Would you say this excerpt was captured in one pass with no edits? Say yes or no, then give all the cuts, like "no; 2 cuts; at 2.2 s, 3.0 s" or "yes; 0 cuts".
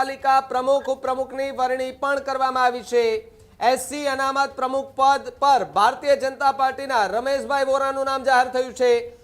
yes; 0 cuts